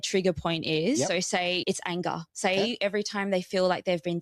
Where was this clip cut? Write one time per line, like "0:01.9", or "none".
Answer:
0:01.6